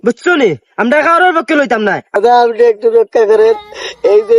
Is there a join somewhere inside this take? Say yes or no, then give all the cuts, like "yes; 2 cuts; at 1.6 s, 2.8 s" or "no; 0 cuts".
yes; 1 cut; at 2.2 s